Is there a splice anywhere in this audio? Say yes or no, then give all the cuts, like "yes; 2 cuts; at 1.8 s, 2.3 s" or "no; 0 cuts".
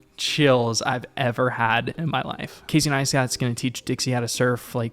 yes; 1 cut; at 2.6 s